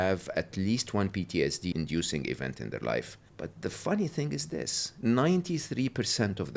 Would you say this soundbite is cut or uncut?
cut